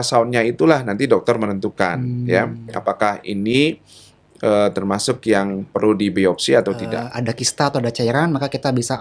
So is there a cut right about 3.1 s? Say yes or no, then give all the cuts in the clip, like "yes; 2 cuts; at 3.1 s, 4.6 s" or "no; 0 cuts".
no; 1 cut; at 7.0 s